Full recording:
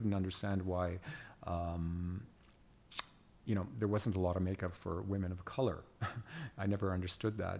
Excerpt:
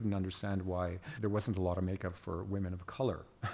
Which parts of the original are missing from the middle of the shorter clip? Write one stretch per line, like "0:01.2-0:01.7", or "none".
0:01.1-0:03.7